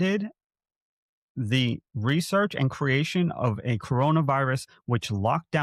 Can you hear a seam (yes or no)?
no